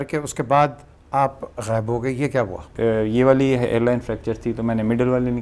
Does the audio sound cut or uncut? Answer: cut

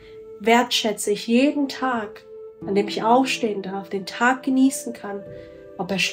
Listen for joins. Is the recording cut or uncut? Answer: uncut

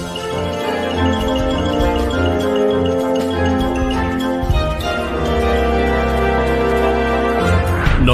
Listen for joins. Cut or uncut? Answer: uncut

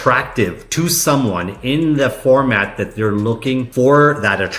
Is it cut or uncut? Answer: cut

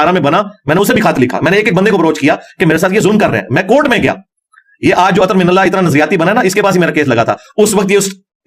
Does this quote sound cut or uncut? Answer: uncut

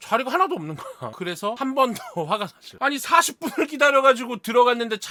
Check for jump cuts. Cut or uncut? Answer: uncut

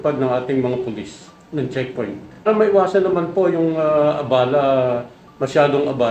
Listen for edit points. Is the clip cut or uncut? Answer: cut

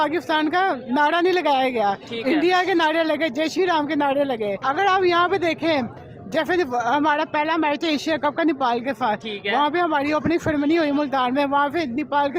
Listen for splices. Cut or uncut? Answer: cut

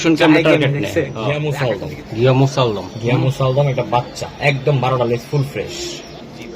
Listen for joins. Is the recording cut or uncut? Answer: cut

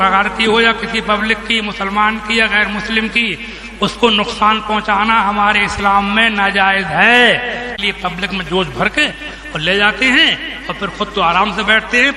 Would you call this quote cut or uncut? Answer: cut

